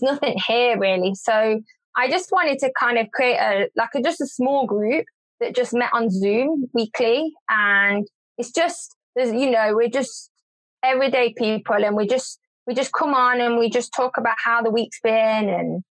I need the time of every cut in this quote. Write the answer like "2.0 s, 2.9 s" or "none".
none